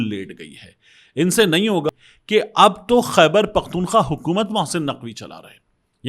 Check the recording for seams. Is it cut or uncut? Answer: cut